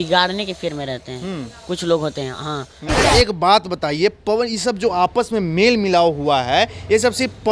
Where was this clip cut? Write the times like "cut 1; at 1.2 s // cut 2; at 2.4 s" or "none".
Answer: cut 1; at 3.1 s